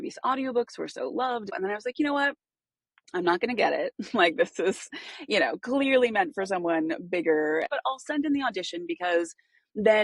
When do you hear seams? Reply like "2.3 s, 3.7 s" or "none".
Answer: 1.5 s, 7.6 s